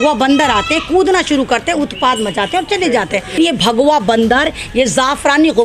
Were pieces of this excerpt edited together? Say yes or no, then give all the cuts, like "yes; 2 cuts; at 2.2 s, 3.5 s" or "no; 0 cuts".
yes; 1 cut; at 3.4 s